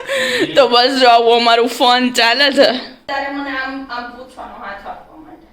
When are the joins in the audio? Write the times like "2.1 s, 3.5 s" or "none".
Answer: 3.1 s